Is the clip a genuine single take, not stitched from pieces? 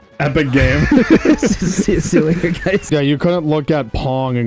no; 1 cut; at 2.8 s

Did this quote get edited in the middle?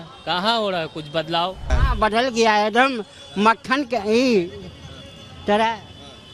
yes; 1 cut; at 1.8 s

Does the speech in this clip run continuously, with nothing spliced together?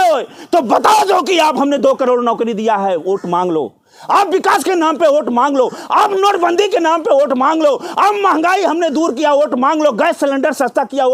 yes; 0 cuts

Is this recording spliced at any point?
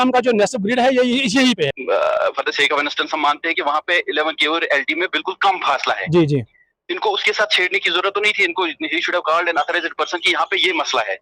yes; 1 cut; at 1.8 s

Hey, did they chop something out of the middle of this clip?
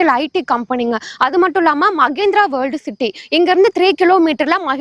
no; 0 cuts

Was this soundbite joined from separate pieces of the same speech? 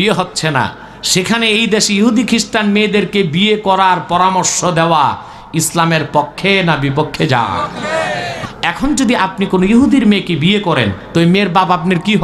yes; 1 cut; at 8.4 s

